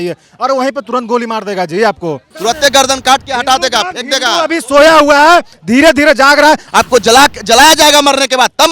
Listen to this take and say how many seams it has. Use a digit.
2